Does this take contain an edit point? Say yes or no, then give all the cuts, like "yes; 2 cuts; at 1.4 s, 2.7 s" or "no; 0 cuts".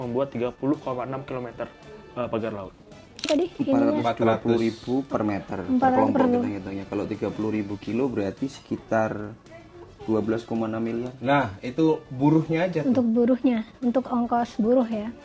yes; 1 cut; at 3.3 s